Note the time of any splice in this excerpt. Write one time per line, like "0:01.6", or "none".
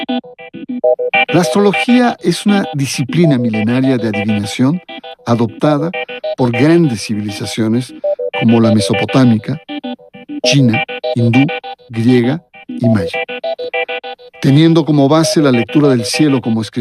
0:03.2